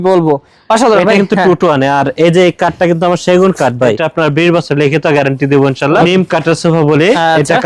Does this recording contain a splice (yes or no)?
yes